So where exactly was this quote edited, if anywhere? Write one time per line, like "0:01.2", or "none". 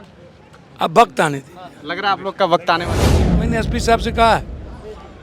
0:03.4

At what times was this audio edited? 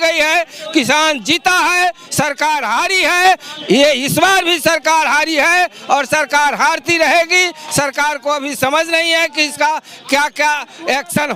none

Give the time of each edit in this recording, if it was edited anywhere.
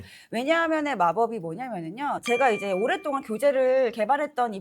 0:02.2

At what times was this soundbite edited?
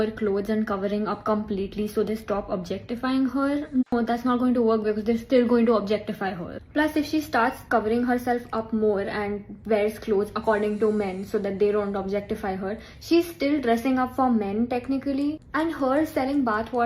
0:03.9
0:07.2

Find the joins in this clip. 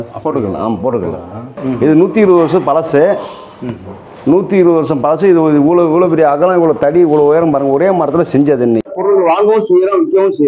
0:01.6
0:08.9

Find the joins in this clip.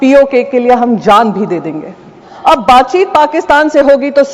0:02.3

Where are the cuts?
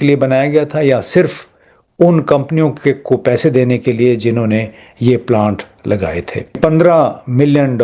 0:06.6

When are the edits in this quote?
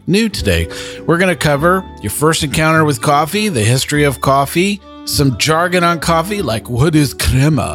0:04.9

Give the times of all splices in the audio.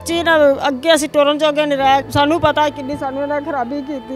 0:02.0

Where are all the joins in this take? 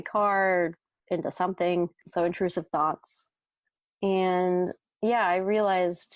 none

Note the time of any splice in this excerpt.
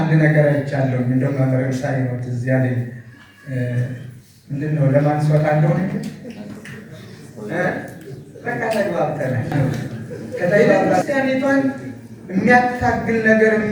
0:11.0

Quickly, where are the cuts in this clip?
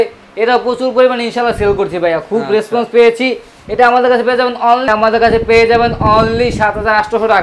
0:04.9

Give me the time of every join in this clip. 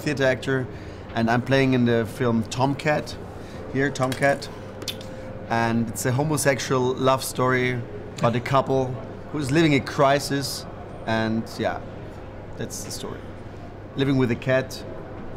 0:14.2

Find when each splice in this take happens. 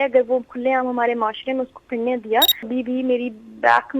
0:02.7

